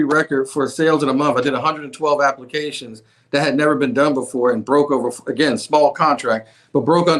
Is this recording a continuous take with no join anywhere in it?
yes; 0 cuts

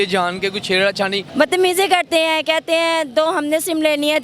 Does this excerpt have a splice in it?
yes; 1 cut; at 1.2 s

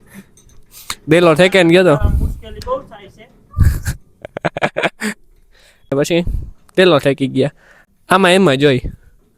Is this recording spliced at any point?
yes; 1 cut; at 5.9 s

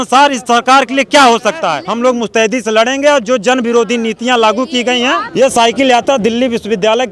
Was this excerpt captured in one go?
no; 2 cuts; at 1.8 s, 5.3 s

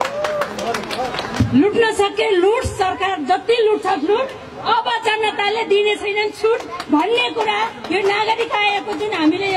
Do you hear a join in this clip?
yes; 1 cut; at 1.4 s

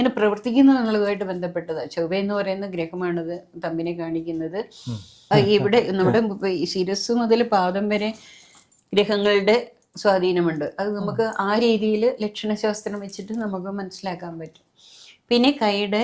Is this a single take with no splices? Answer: no; 1 cut; at 5.3 s

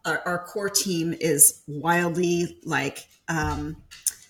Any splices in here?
no; 0 cuts

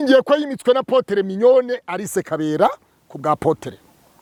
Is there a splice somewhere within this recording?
no; 0 cuts

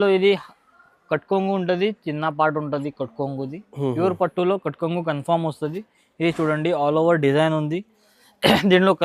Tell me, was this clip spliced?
no; 0 cuts

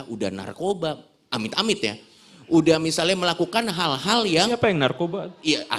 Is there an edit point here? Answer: no; 0 cuts

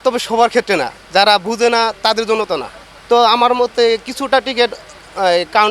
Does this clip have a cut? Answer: no; 0 cuts

